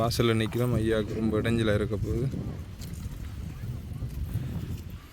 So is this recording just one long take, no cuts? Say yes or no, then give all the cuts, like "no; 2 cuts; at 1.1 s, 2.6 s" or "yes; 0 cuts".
yes; 0 cuts